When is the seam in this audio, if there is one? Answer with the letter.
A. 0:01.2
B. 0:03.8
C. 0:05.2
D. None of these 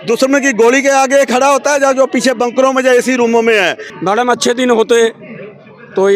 B